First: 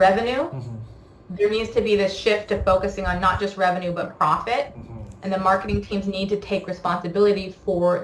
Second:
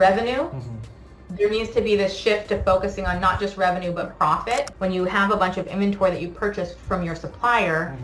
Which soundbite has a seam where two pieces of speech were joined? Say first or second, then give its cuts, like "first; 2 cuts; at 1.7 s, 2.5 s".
second; 1 cut; at 4.7 s